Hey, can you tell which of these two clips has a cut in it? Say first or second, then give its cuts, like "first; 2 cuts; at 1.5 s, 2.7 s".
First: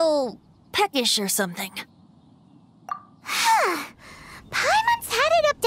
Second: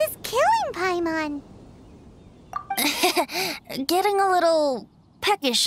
second; 1 cut; at 2.6 s